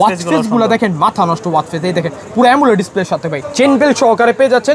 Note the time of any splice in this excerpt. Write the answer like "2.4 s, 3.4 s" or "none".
3.4 s